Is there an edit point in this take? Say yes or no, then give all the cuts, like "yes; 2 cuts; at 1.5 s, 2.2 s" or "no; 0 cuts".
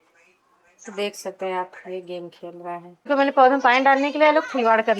yes; 1 cut; at 3.0 s